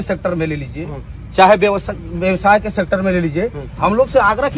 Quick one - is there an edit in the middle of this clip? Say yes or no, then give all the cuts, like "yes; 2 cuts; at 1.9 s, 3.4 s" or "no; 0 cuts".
no; 0 cuts